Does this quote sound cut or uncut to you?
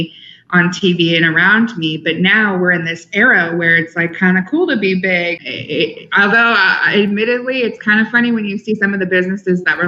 cut